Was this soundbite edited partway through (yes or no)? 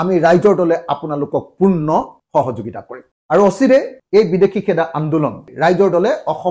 yes